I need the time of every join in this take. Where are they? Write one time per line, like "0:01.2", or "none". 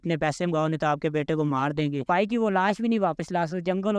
0:02.1

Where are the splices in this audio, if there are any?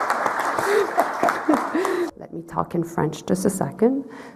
0:02.1

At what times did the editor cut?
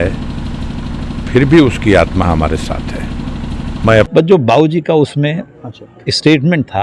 0:04.1

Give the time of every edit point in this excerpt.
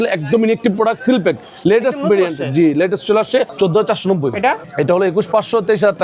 0:03.5
0:04.6

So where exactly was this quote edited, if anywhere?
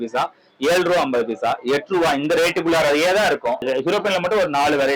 0:03.6

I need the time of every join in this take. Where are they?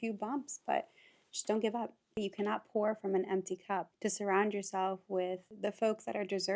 0:02.2
0:03.9
0:05.5

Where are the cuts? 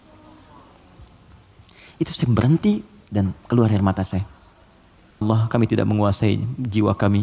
0:05.2

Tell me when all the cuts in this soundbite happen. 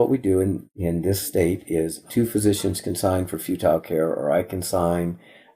0:01.2
0:02.0

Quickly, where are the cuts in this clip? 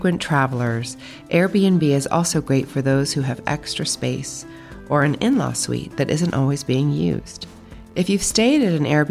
none

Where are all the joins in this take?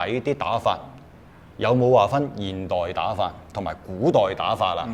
none

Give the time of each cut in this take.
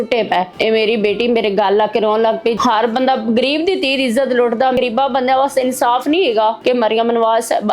0:02.6
0:04.8
0:06.6

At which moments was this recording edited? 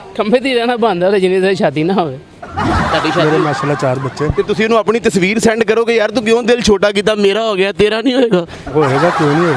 0:02.9
0:08.6

